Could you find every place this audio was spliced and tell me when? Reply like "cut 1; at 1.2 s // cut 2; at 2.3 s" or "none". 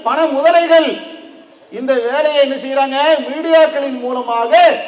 none